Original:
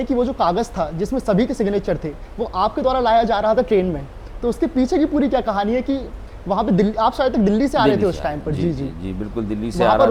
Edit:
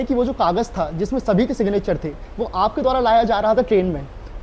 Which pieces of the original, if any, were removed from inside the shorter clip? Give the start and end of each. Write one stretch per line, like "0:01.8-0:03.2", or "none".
none